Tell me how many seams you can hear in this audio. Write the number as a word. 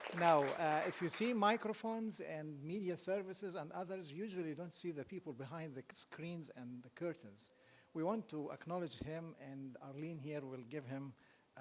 one